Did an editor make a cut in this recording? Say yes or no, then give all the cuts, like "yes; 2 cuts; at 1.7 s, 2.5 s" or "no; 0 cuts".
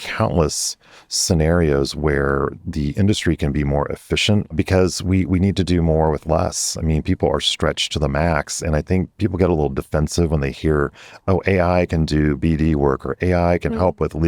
yes; 1 cut; at 4.5 s